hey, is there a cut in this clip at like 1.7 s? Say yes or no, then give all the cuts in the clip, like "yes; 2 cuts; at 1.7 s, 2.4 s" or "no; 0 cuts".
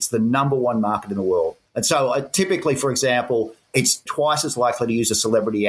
yes; 2 cuts; at 1.7 s, 3.8 s